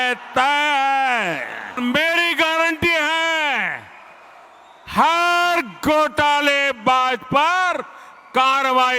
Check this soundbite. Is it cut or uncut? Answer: cut